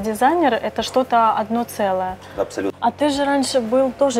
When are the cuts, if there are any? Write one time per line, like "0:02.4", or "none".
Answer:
0:02.4